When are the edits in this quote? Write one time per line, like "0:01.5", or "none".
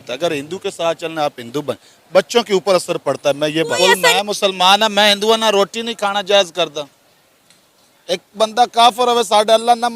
0:03.8